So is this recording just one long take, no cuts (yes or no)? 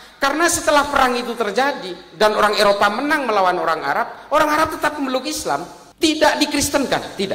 no